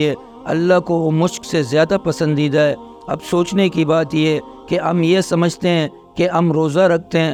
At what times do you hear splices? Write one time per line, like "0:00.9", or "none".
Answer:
none